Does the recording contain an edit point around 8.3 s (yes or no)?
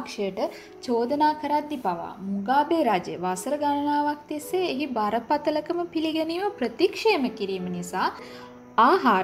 yes